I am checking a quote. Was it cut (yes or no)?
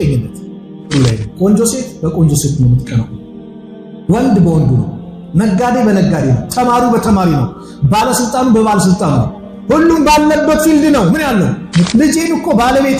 yes